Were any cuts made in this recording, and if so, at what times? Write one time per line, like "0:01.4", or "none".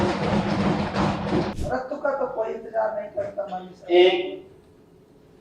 0:01.5